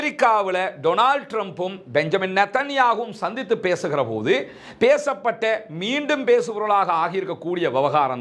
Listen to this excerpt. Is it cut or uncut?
uncut